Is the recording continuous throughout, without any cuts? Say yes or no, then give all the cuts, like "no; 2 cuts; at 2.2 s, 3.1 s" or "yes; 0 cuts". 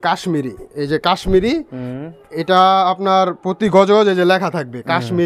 yes; 0 cuts